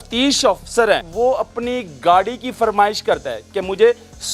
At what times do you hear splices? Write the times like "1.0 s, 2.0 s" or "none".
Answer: 1.1 s